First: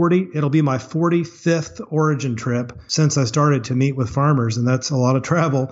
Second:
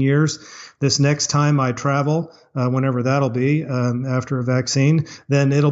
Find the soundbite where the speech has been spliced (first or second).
first